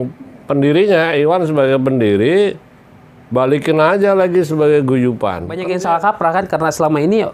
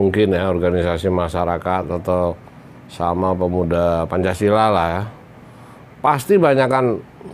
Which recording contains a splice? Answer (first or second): first